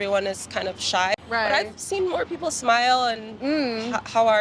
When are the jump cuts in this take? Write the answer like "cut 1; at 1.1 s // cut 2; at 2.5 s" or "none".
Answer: cut 1; at 1.1 s